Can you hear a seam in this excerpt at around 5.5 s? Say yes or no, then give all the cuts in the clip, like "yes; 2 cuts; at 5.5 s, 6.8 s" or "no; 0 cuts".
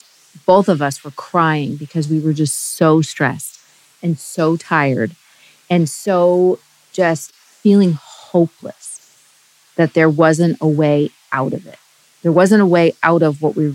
no; 1 cut; at 7.5 s